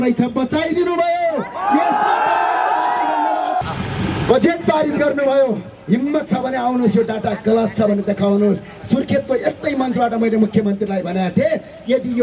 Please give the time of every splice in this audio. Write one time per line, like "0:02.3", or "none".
0:03.6